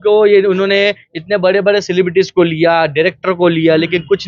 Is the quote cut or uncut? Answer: uncut